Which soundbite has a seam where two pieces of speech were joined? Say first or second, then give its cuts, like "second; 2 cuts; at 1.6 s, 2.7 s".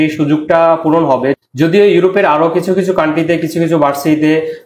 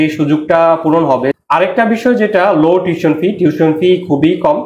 second; 1 cut; at 1.4 s